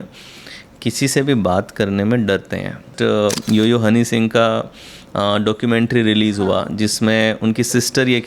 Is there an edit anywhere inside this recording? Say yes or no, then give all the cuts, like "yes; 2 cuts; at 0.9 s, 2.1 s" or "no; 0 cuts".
yes; 1 cut; at 2.9 s